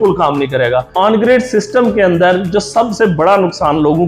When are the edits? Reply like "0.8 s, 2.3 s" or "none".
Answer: 0.9 s